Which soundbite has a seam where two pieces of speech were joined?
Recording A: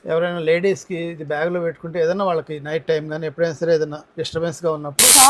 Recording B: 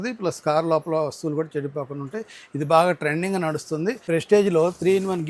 B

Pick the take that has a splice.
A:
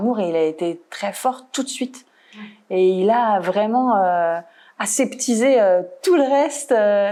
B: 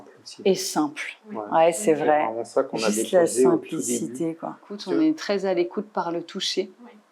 B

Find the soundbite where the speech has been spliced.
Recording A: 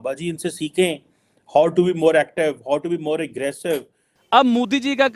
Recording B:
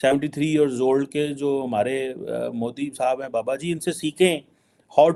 A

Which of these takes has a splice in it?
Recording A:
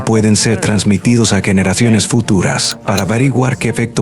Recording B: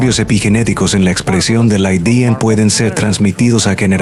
A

